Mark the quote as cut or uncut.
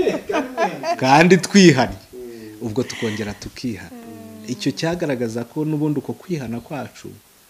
uncut